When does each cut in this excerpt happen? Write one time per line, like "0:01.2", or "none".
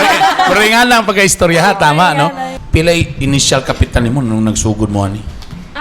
0:02.6